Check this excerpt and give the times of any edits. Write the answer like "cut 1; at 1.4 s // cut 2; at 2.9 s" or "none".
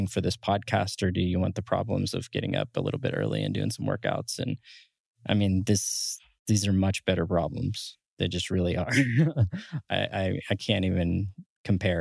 none